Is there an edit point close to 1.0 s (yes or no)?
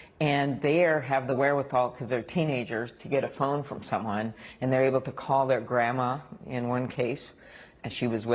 yes